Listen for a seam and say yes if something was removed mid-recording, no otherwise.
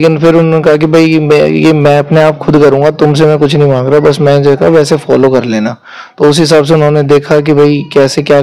no